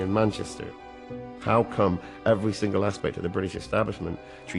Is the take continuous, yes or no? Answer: no